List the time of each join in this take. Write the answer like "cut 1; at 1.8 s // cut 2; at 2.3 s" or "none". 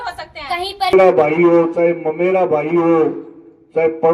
cut 1; at 0.9 s